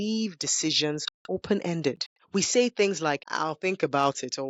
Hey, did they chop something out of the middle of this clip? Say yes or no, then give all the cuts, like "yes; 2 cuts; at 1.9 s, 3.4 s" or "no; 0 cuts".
yes; 3 cuts; at 1.1 s, 2.1 s, 3.3 s